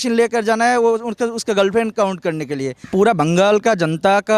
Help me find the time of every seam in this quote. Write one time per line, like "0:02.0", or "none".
0:02.8

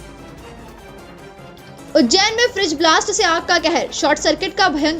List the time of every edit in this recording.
0:01.9

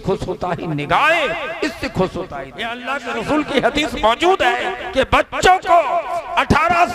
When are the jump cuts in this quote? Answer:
0:02.8
0:04.8

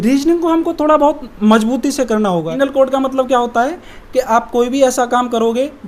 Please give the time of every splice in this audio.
0:02.5

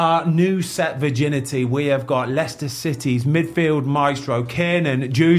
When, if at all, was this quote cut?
none

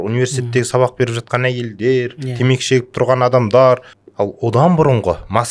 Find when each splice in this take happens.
0:04.0

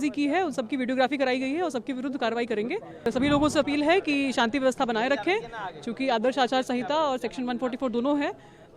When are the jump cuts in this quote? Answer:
0:03.1

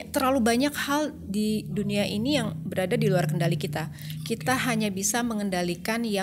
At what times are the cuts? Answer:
none

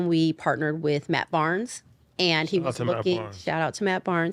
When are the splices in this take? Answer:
none

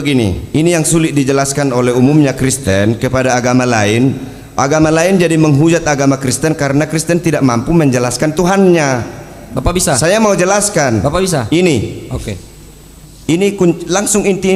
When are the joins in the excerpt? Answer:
0:01.0

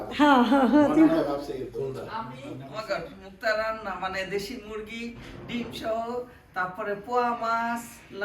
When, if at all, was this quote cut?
0:02.4

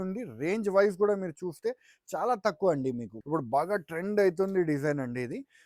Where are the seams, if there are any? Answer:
0:03.1

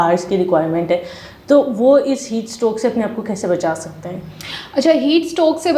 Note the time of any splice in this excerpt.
none

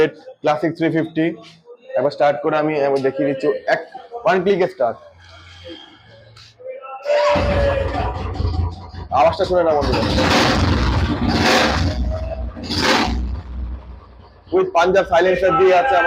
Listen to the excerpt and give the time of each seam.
none

